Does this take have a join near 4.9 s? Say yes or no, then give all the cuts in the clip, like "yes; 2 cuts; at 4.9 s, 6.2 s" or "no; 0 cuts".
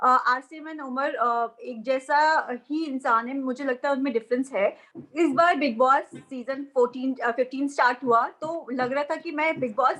yes; 1 cut; at 4.9 s